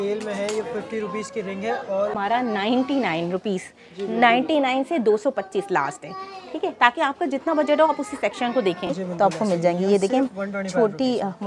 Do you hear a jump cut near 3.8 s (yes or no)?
no